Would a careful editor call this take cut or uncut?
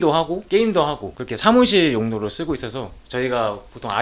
uncut